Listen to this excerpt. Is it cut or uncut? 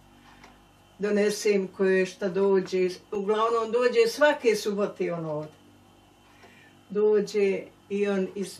uncut